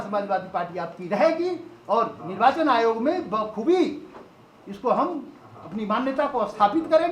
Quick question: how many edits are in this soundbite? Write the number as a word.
zero